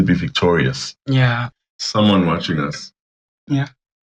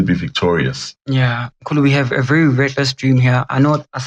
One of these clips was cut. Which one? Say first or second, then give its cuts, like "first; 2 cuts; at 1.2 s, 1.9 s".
first; 1 cut; at 1.5 s